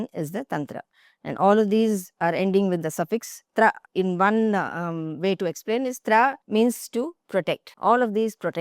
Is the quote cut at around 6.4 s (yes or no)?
yes